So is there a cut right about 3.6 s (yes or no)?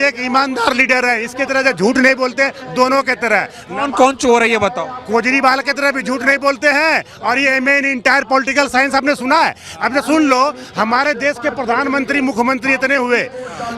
no